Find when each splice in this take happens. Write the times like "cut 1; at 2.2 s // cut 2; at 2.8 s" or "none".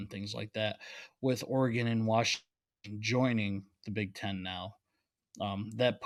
none